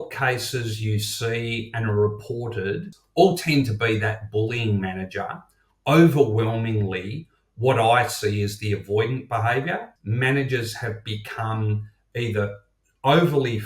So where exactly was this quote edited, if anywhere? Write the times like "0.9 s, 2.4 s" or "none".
3.0 s, 9.9 s

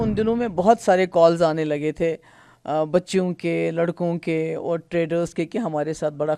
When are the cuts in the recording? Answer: none

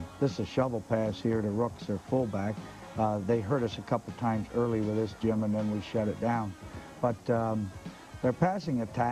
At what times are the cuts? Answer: 2.5 s

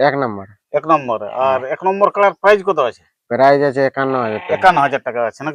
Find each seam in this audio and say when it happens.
none

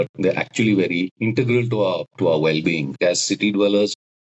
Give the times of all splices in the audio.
1.1 s, 2.1 s, 3.0 s

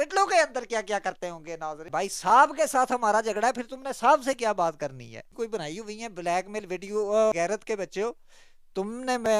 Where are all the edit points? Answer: 1.8 s, 5.3 s, 7.3 s

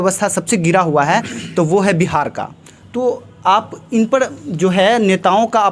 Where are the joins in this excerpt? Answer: none

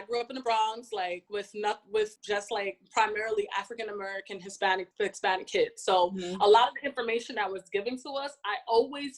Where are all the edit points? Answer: 1.2 s, 2.2 s, 4.9 s

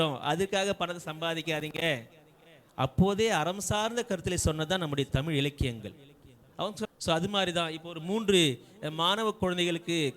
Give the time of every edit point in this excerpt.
6.9 s

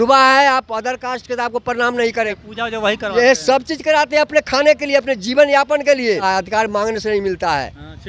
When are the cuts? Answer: 2.3 s, 6.2 s

